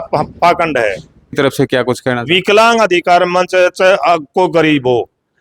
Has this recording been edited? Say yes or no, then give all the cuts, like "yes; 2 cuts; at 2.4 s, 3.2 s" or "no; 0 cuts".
yes; 1 cut; at 1.4 s